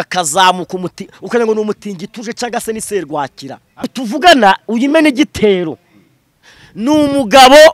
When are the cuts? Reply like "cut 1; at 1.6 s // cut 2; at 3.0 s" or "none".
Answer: cut 1; at 3.8 s

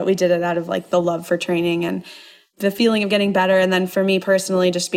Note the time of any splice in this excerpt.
cut 1; at 2.4 s

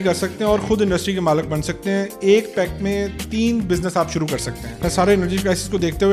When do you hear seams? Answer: cut 1; at 4.8 s

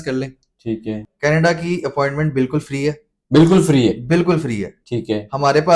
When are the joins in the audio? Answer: cut 1; at 1.1 s

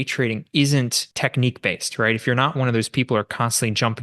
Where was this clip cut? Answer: cut 1; at 1.0 s

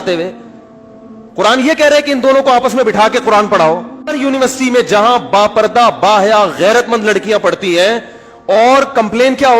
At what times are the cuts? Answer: cut 1; at 4.0 s

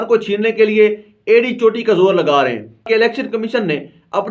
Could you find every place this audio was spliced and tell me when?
cut 1; at 2.8 s

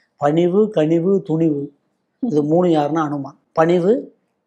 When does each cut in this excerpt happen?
none

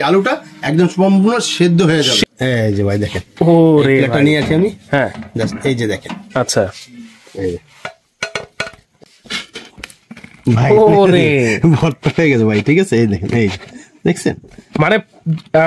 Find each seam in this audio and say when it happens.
cut 1; at 2.2 s // cut 2; at 8.9 s

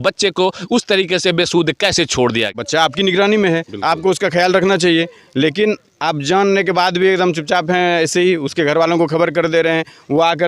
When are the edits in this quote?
cut 1; at 2.6 s

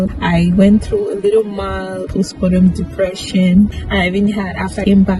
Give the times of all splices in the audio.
none

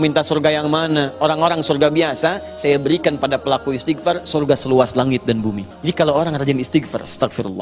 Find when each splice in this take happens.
cut 1; at 5.7 s

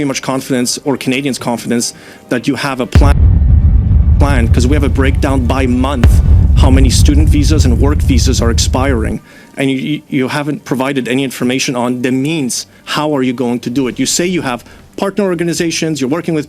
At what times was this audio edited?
none

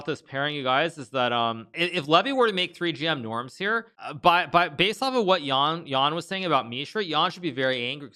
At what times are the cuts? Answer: cut 1; at 1.7 s // cut 2; at 4.0 s

